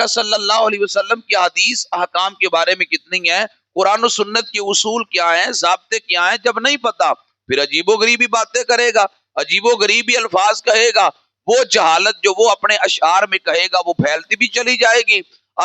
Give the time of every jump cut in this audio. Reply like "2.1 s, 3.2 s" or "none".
none